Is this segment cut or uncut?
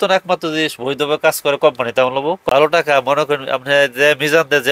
cut